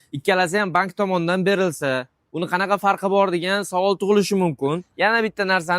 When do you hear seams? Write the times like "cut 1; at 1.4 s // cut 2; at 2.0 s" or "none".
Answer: cut 1; at 4.9 s